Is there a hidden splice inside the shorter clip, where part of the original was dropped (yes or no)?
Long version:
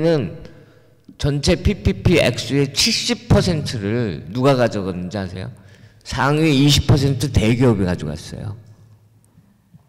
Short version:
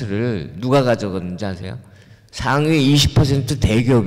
no